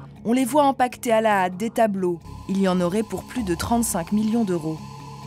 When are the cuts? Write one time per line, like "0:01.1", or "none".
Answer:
0:02.3